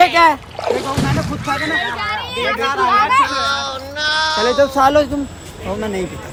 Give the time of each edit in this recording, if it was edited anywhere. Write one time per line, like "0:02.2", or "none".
none